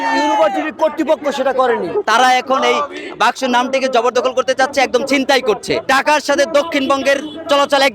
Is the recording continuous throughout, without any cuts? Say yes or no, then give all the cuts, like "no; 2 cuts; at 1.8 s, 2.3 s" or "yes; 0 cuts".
no; 2 cuts; at 1.9 s, 5.8 s